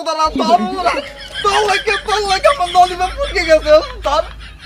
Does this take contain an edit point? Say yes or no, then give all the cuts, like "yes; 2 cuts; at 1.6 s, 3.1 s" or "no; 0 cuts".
no; 0 cuts